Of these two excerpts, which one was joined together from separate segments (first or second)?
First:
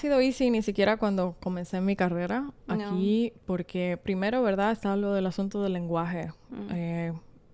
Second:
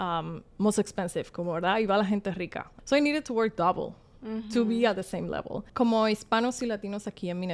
second